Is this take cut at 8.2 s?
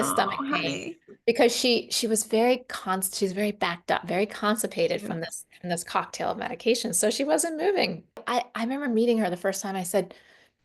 yes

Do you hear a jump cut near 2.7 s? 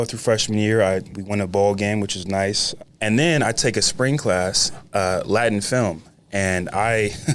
yes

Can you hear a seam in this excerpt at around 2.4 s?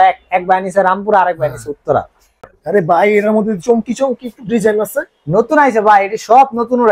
yes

